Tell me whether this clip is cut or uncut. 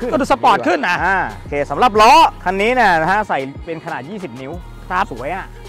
uncut